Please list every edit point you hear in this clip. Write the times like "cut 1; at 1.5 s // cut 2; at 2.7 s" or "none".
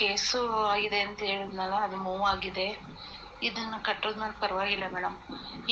none